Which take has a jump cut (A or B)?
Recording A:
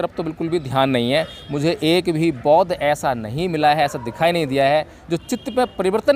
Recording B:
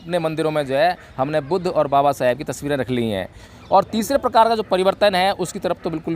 B